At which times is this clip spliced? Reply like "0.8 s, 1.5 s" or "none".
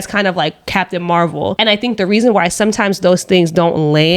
1.5 s